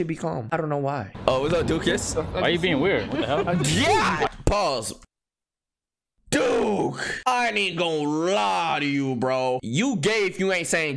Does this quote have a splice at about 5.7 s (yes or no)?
yes